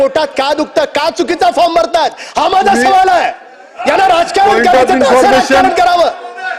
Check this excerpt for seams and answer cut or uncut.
uncut